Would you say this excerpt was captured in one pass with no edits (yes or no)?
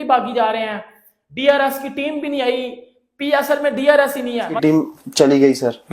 no